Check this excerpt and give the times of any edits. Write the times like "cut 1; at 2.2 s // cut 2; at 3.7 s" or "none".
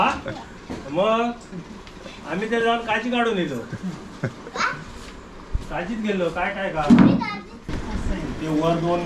cut 1; at 7.7 s